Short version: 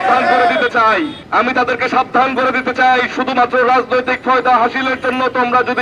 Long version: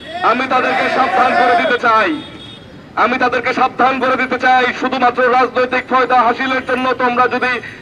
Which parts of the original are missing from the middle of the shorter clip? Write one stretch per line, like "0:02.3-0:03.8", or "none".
0:02.3-0:02.8